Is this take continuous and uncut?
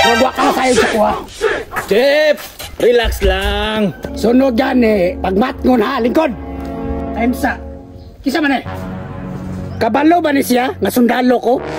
yes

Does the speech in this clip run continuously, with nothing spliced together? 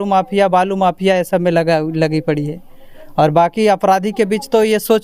yes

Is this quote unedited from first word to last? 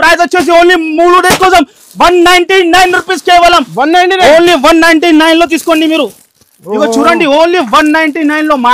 yes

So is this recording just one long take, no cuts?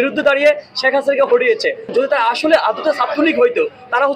no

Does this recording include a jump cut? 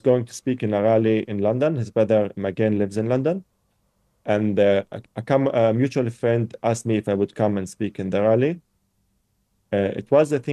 no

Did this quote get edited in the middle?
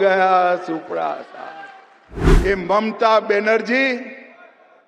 yes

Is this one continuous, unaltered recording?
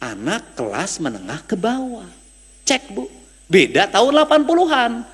yes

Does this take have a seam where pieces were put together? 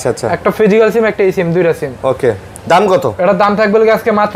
no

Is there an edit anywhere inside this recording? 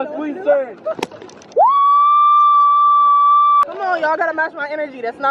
yes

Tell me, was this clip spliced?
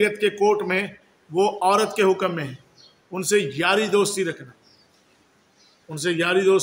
no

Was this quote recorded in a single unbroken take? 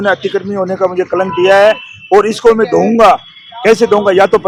yes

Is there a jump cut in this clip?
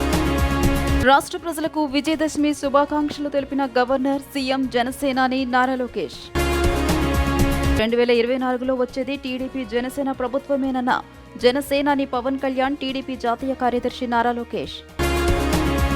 yes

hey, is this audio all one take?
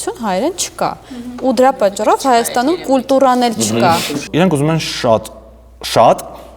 no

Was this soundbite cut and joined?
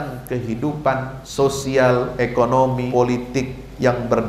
yes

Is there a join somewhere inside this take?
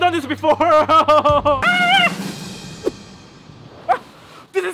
yes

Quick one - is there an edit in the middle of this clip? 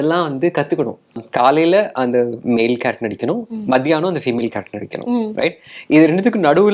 yes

